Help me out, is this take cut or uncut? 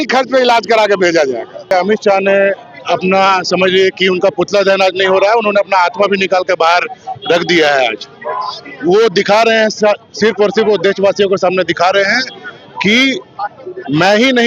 uncut